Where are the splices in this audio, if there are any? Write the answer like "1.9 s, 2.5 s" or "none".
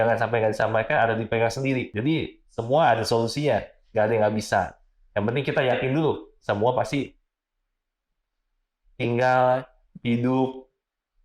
1.9 s